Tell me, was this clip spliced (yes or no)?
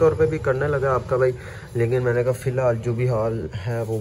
no